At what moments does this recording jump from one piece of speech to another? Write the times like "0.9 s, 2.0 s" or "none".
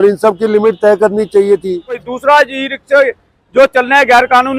2.1 s